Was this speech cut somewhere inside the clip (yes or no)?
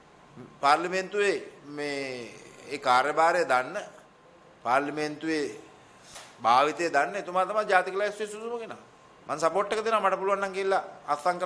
no